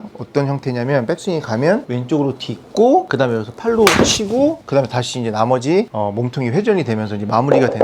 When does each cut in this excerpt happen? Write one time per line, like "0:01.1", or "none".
0:01.9
0:03.1
0:04.6
0:05.9